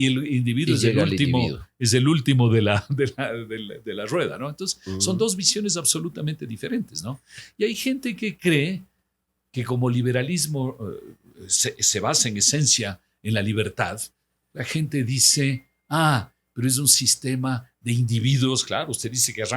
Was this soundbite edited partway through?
no; 0 cuts

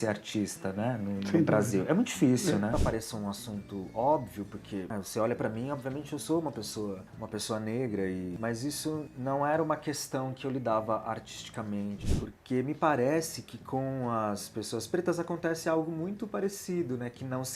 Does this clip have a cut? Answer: yes; 3 cuts; at 2.7 s, 8.3 s, 12.1 s

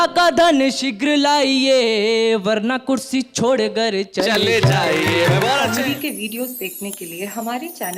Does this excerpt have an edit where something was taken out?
yes; 1 cut; at 5.7 s

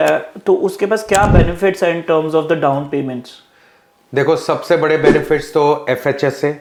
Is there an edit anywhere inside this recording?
no; 0 cuts

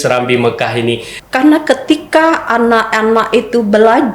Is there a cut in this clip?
yes; 1 cut; at 1.1 s

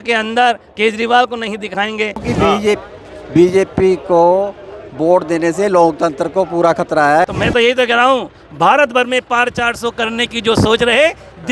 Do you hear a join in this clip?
yes; 2 cuts; at 2.2 s, 7.3 s

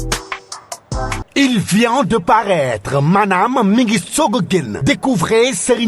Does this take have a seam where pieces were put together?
yes; 1 cut; at 1.2 s

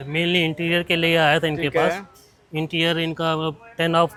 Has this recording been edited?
no; 0 cuts

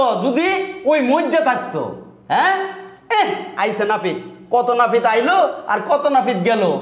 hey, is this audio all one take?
yes; 0 cuts

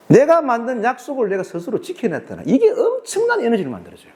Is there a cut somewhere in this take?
no; 0 cuts

